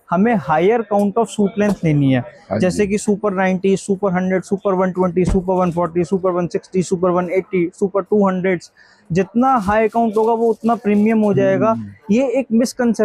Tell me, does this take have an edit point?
no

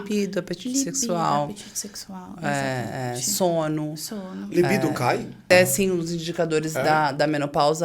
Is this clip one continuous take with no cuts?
no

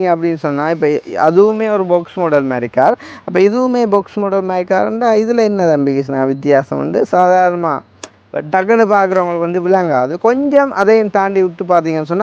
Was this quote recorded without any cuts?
yes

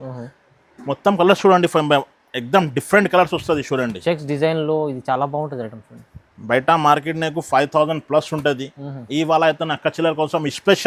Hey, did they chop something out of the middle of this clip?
no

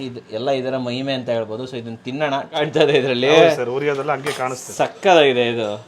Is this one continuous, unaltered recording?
no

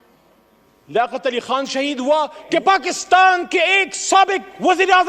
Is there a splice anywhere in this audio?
yes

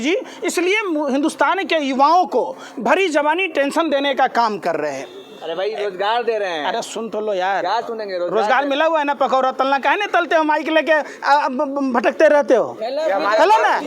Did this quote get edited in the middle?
no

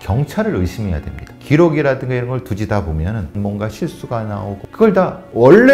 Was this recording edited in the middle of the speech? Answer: yes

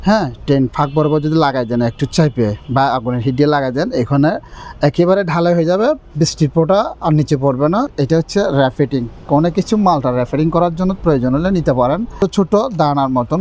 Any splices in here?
yes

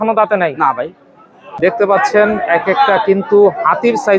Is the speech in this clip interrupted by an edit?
yes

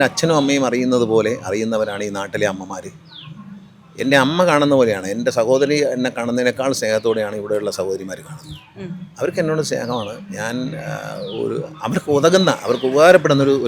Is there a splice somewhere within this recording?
no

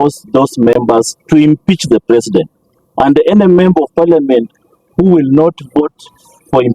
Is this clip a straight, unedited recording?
yes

